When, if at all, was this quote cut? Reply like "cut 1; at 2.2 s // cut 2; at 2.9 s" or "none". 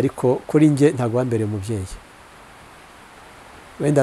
none